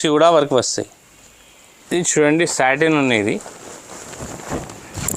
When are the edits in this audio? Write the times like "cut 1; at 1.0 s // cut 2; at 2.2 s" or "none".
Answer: none